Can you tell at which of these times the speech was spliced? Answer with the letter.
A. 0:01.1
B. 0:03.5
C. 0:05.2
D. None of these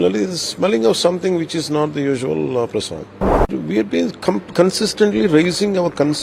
B